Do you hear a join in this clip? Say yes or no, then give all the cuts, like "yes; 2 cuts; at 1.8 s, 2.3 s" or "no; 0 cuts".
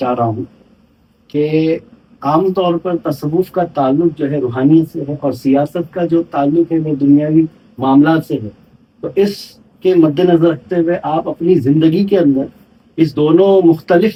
no; 0 cuts